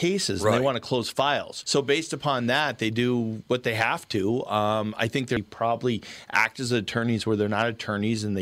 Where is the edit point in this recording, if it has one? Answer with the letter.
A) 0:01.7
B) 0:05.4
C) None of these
B